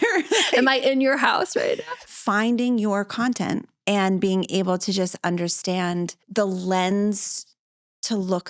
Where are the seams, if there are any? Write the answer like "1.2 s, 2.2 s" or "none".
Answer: 2.0 s, 3.7 s, 6.2 s